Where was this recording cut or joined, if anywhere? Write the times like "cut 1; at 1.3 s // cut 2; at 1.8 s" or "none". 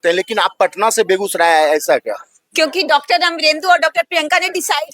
none